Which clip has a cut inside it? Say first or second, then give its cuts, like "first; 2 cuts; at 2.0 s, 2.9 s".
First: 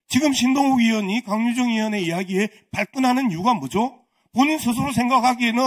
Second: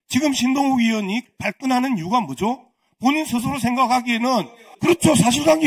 second; 2 cuts; at 1.2 s, 4.6 s